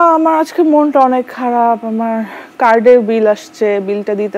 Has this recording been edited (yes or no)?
no